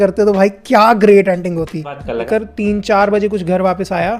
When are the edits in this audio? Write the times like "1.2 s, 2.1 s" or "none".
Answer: 2.1 s